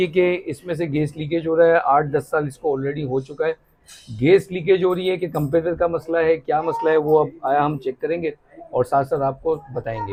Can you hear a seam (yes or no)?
no